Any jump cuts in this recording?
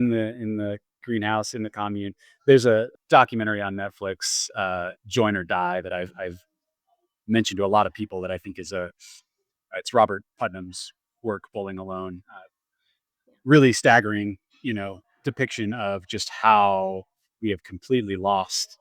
yes; 2 cuts; at 2.9 s, 15.0 s

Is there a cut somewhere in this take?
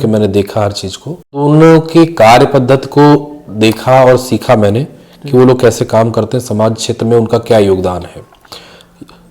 yes; 1 cut; at 1.4 s

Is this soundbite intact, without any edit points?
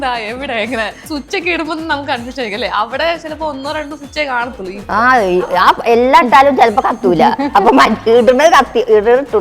no; 2 cuts; at 1.0 s, 4.8 s

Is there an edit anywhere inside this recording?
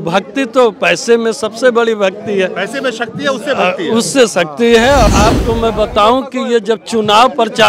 yes; 1 cut; at 5.0 s

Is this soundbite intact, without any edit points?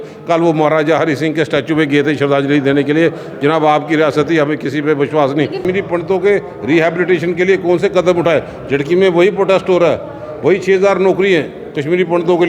no; 1 cut; at 5.6 s

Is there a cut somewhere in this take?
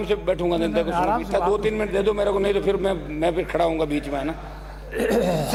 no; 0 cuts

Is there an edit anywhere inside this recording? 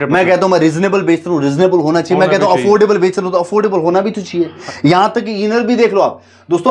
yes; 1 cut; at 4.6 s

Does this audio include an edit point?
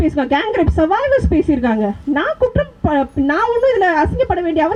no; 0 cuts

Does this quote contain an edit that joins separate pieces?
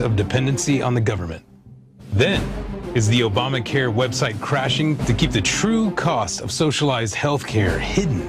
no; 0 cuts

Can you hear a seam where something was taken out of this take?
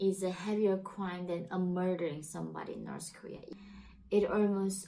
yes; 1 cut; at 3.4 s

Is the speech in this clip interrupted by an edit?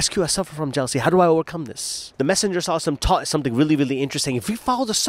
yes; 1 cut; at 2.0 s

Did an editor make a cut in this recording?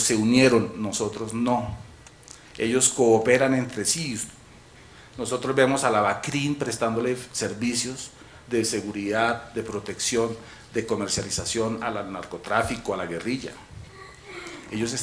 yes; 1 cut; at 2.7 s

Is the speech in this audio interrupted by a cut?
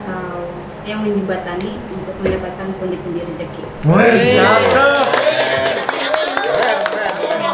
no; 0 cuts

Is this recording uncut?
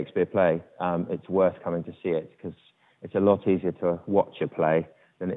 yes; 0 cuts

